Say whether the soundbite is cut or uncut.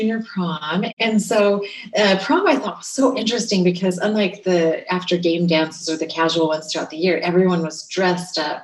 cut